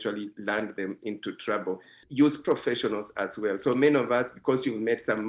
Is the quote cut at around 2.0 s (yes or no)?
yes